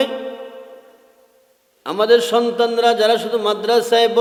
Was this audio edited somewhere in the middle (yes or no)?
no